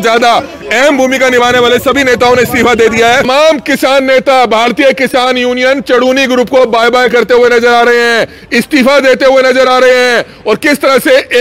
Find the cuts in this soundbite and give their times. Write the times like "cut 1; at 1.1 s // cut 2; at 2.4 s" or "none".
cut 1; at 3.3 s

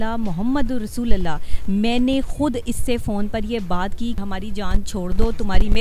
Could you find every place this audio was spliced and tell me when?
cut 1; at 4.2 s

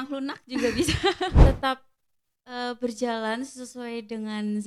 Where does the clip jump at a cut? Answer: cut 1; at 1.4 s

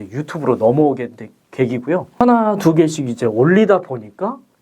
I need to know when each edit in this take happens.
cut 1; at 2.2 s

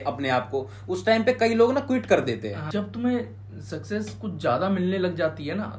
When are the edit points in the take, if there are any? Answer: cut 1; at 2.6 s

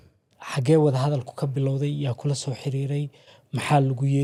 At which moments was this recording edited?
none

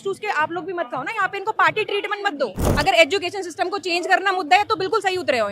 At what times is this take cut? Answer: cut 1; at 2.6 s

